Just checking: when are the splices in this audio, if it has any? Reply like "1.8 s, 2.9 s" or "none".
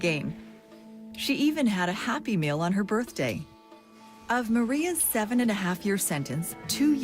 6.1 s